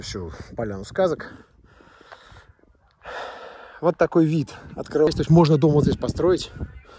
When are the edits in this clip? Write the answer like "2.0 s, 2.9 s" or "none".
5.1 s

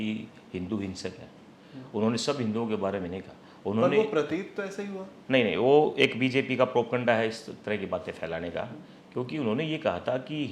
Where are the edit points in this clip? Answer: none

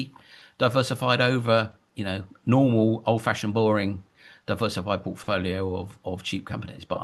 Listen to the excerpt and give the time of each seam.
none

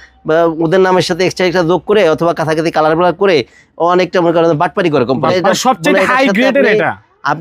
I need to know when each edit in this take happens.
5.3 s

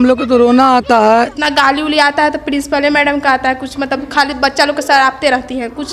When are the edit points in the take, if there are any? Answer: 1.4 s

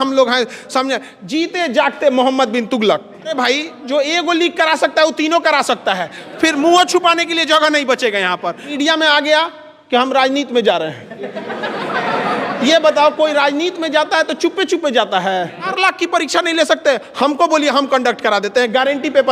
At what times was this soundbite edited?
3.4 s, 8.7 s, 15.7 s

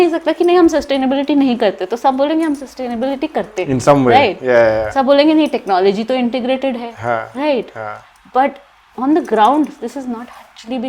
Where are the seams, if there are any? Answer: none

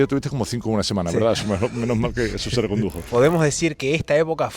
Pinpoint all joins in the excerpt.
3.0 s

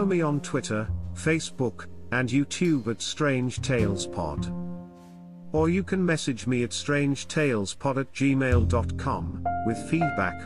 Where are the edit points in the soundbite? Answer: none

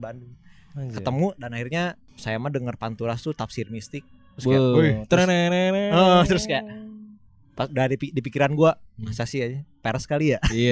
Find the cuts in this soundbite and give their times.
2.1 s

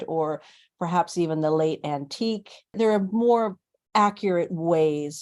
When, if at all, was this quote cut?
2.7 s

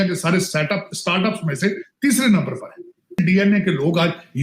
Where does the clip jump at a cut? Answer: 3.2 s

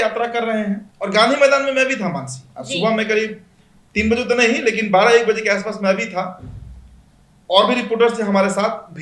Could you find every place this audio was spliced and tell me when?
none

